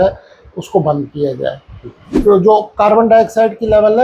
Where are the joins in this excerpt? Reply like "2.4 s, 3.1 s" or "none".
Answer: 2.1 s